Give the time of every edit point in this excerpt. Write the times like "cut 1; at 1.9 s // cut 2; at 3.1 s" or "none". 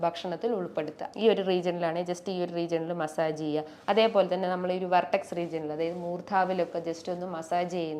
cut 1; at 1.0 s